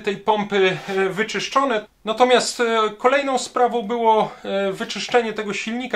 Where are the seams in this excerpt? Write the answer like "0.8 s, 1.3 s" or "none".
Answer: 1.8 s